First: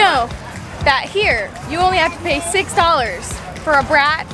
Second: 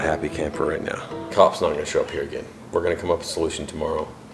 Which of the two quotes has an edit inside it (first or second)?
second